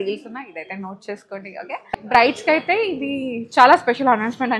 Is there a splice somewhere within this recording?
yes; 1 cut; at 2.1 s

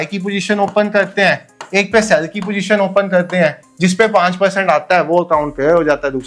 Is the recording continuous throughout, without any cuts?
yes; 0 cuts

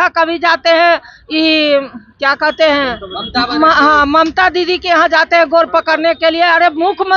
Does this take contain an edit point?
no; 0 cuts

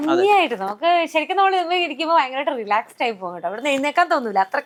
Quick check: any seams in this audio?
no; 0 cuts

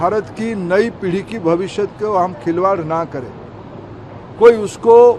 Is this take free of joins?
yes; 0 cuts

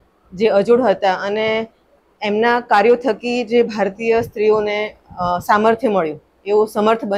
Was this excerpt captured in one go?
no; 1 cut; at 2.0 s

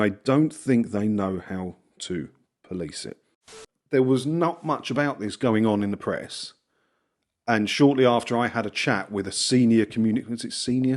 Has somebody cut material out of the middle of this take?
yes; 1 cut; at 3.6 s

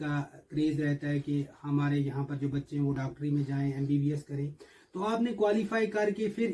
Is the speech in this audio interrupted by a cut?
no; 0 cuts

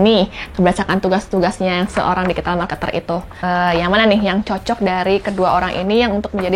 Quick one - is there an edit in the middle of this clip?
no; 0 cuts

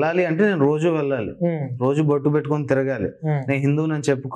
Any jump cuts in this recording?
no; 0 cuts

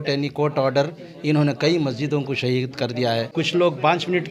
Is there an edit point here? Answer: yes; 1 cut; at 3.3 s

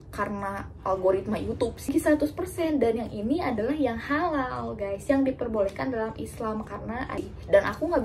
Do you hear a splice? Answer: yes; 2 cuts; at 1.9 s, 7.1 s

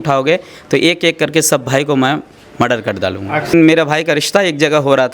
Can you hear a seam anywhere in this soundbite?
yes; 1 cut; at 3.5 s

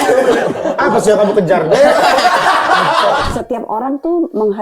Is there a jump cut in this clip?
yes; 1 cut; at 3.3 s

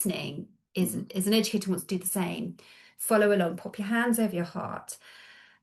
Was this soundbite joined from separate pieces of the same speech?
no; 0 cuts

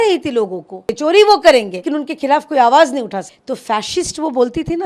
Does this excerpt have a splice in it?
yes; 3 cuts; at 0.9 s, 1.8 s, 3.3 s

